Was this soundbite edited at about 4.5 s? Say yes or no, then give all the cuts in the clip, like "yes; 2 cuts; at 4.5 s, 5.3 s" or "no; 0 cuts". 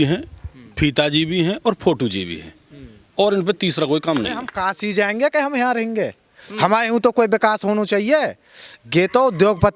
yes; 1 cut; at 4.5 s